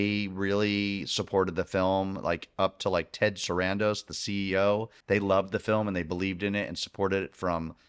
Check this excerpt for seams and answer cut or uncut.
cut